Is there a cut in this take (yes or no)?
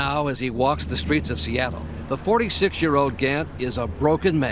yes